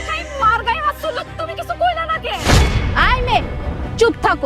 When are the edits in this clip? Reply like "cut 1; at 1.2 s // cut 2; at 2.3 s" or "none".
none